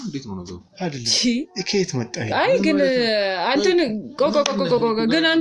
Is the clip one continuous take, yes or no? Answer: yes